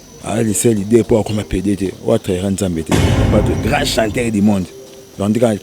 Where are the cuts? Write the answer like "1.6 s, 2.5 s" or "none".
3.1 s